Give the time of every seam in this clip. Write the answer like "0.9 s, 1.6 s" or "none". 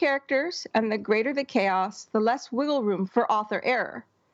3.1 s